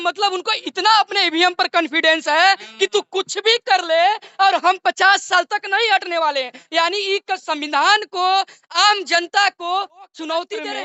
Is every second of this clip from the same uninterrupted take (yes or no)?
yes